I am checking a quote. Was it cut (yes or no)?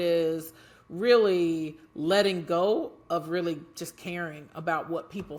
no